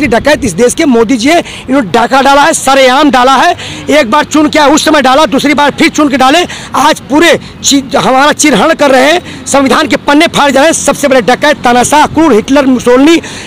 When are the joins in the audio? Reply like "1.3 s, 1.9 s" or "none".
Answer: none